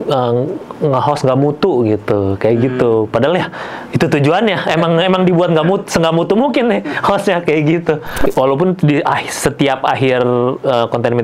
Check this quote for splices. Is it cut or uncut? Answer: cut